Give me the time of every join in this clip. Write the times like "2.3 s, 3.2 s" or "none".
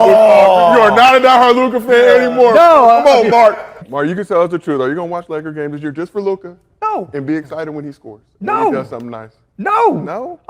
3.8 s